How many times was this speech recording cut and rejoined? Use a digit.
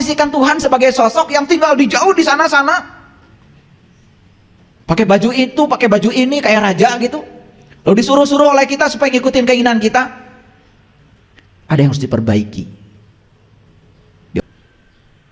1